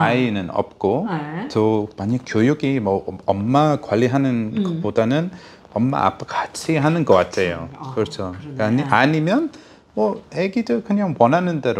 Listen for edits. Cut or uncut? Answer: uncut